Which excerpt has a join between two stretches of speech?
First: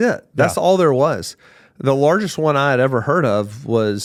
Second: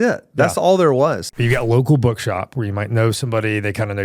second; 1 cut; at 1.3 s

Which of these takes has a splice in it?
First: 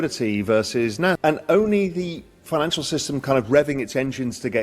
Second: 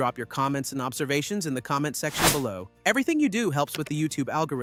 first; 1 cut; at 1.2 s

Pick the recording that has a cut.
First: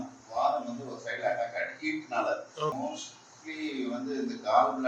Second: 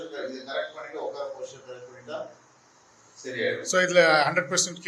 first; 1 cut; at 2.7 s

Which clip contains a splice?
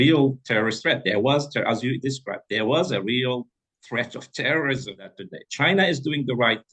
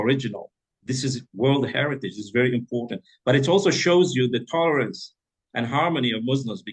first; 1 cut; at 5.5 s

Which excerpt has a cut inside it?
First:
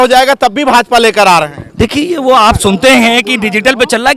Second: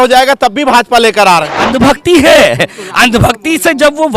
second; 1 cut; at 1.6 s

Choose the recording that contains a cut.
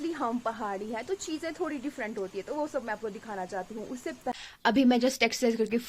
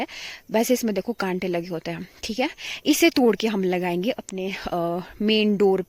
first; 1 cut; at 4.3 s

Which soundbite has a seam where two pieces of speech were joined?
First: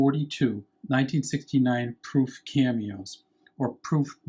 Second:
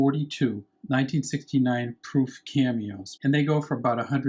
second; 1 cut; at 3.0 s

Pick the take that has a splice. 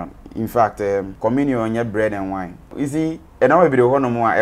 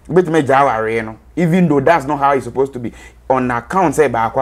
first; 2 cuts; at 1.1 s, 2.7 s

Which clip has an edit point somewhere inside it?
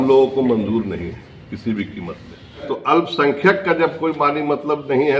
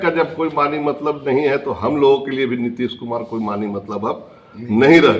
first; 1 cut; at 2.7 s

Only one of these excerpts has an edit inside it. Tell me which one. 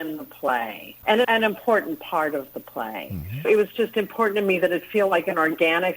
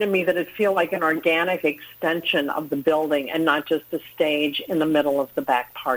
first; 2 cuts; at 1.2 s, 3.4 s

